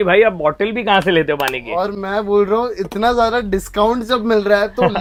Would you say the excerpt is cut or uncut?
uncut